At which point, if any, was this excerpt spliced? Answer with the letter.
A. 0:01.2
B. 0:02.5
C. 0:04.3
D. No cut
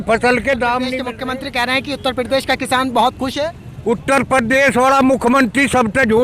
A